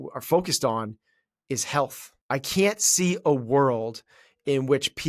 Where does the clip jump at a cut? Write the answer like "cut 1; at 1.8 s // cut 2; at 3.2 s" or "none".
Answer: cut 1; at 2.2 s